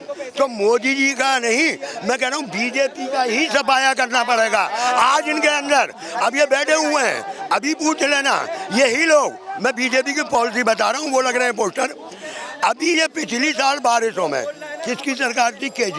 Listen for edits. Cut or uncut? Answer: uncut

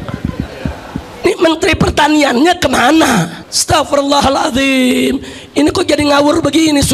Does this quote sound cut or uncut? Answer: uncut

